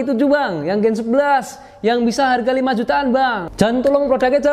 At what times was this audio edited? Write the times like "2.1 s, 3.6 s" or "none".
3.4 s

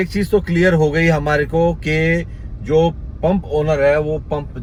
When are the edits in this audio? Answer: none

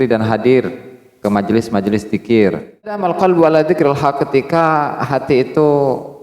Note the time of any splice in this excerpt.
3.0 s

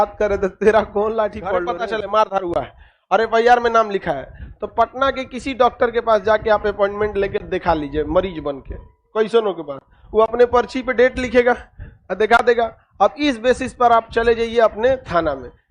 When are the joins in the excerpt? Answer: 1.6 s

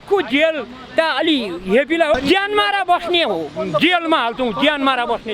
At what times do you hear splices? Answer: 2.1 s

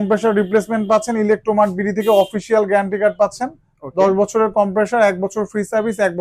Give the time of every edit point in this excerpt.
none

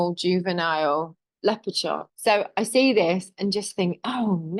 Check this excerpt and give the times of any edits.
2.1 s

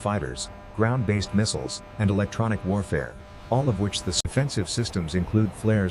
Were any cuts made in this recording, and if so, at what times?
4.2 s

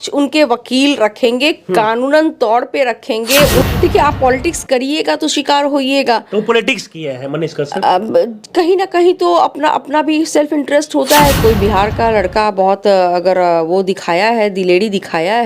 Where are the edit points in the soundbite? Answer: 3.6 s, 11.4 s

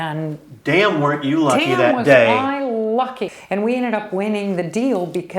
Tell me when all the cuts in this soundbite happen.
3.2 s

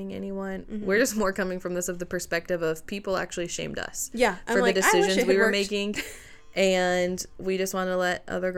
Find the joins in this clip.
none

